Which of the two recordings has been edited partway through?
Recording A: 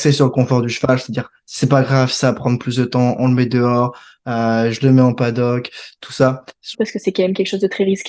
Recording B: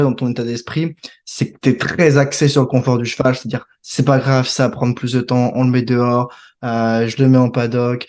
A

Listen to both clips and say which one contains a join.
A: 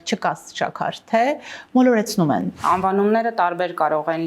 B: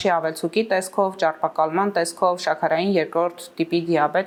A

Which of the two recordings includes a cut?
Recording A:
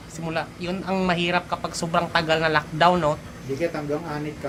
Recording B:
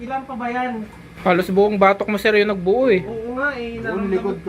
B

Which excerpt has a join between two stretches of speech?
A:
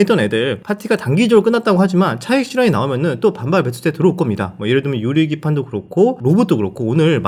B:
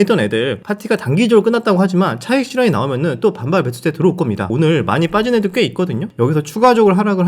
B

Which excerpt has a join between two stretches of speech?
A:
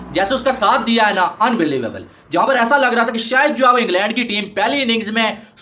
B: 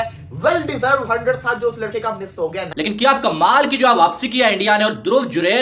B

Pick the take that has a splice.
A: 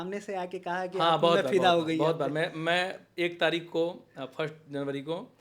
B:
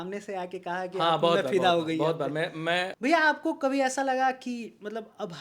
B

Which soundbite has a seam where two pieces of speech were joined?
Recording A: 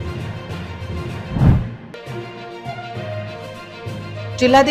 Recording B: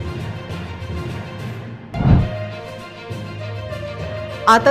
B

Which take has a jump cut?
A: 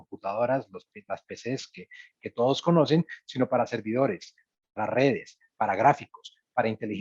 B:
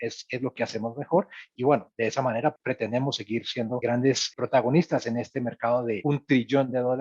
B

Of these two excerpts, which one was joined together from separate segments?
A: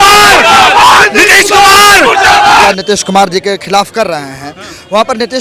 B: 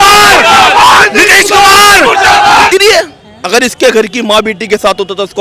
B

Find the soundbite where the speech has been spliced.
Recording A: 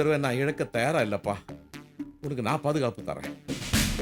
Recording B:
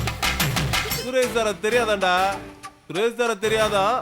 B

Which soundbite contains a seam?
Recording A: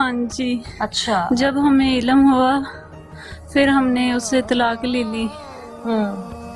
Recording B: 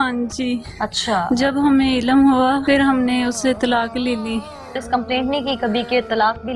B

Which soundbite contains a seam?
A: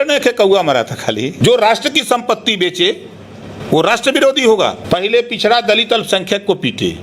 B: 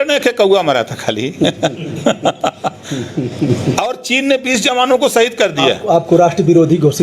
A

